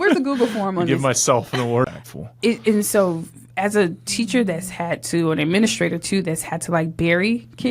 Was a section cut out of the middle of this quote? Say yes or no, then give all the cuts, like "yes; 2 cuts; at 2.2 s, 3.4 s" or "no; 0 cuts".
yes; 1 cut; at 1.9 s